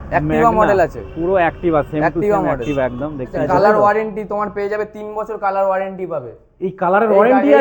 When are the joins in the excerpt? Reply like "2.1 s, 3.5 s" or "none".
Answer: 3.4 s